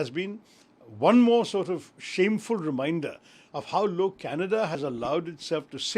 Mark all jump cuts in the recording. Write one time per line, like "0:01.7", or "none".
none